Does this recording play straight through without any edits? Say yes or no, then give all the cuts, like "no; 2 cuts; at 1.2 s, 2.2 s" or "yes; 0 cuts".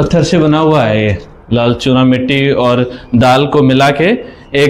yes; 0 cuts